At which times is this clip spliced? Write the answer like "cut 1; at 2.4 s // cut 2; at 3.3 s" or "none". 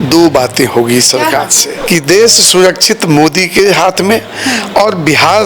cut 1; at 1.7 s